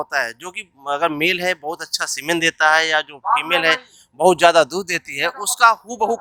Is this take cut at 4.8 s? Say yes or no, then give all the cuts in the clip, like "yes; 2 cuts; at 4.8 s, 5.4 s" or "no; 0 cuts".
no; 0 cuts